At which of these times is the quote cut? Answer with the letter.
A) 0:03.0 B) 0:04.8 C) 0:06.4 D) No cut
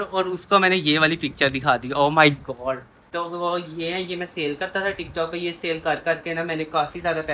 A